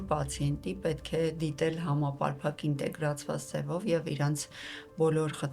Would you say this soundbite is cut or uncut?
uncut